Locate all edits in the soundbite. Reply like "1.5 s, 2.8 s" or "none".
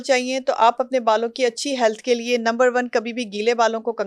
none